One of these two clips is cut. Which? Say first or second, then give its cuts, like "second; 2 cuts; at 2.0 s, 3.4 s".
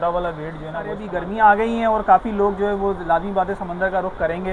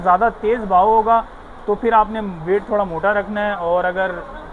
first; 1 cut; at 1.0 s